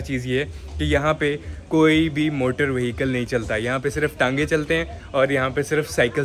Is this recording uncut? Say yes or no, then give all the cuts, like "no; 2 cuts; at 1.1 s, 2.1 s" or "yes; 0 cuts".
yes; 0 cuts